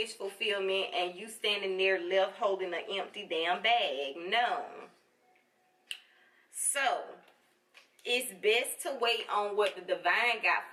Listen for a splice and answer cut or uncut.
uncut